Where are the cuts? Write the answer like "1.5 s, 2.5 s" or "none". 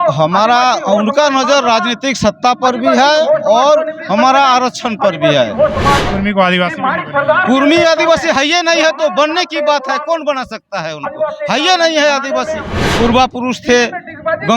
6.1 s, 12.8 s